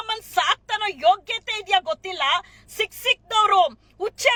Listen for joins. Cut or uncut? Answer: uncut